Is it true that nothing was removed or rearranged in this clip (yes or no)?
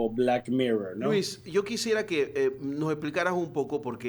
yes